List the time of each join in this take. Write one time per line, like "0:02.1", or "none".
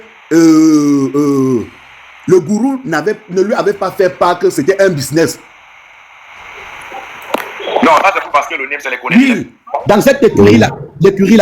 0:09.8